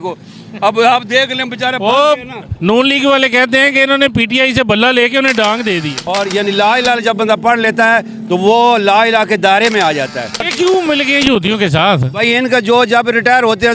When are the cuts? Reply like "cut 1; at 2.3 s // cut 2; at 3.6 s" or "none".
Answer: cut 1; at 6.0 s // cut 2; at 10.5 s